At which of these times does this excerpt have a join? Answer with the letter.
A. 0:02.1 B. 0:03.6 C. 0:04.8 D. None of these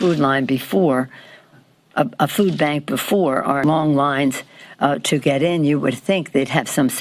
B